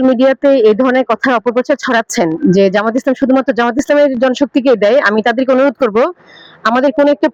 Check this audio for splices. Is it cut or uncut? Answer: uncut